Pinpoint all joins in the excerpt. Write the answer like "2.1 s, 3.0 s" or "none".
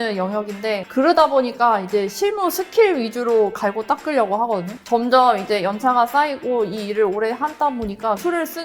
4.8 s